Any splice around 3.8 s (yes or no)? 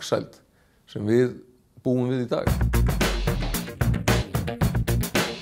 no